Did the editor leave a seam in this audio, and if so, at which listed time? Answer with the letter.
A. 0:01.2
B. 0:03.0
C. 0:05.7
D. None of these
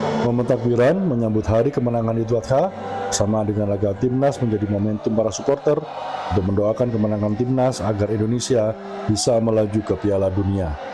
C